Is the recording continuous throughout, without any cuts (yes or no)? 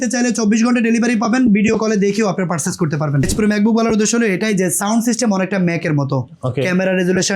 no